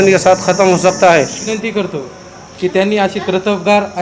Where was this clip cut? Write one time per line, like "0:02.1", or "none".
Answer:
0:01.5